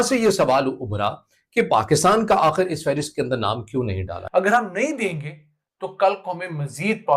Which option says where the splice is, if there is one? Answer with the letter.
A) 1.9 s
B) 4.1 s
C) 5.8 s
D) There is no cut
B